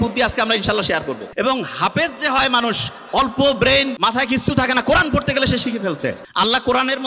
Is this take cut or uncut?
cut